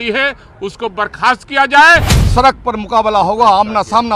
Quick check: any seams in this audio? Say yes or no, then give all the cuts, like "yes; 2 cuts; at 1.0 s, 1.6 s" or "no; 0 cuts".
yes; 1 cut; at 2.1 s